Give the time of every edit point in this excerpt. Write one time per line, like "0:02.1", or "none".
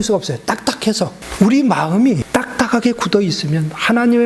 0:01.2
0:02.2